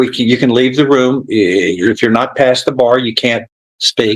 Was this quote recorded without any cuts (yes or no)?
yes